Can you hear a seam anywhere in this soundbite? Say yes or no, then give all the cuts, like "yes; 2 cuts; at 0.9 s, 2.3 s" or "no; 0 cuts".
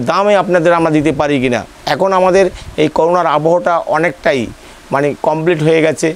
yes; 1 cut; at 1.7 s